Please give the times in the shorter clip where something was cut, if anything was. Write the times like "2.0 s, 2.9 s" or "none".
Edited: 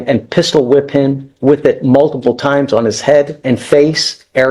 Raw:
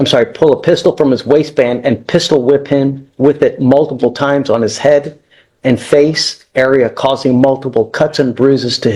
3.4 s